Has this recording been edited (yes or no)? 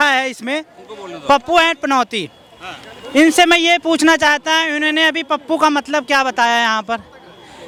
no